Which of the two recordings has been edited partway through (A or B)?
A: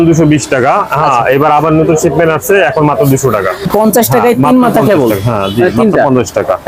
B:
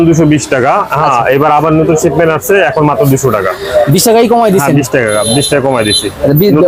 A